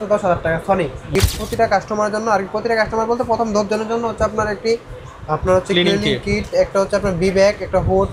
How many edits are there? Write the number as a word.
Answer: one